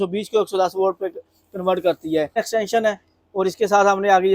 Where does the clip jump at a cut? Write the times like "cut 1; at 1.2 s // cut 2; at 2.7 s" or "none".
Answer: cut 1; at 2.4 s